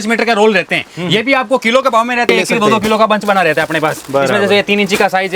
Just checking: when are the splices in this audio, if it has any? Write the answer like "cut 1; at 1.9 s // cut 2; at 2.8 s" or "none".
cut 1; at 2.3 s